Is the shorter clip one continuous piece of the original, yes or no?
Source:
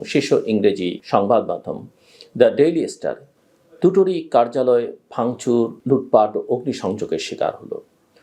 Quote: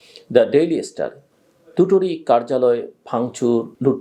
yes